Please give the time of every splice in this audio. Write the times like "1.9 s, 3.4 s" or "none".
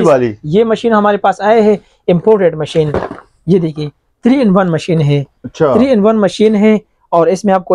none